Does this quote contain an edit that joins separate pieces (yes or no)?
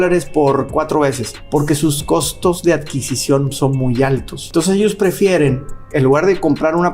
yes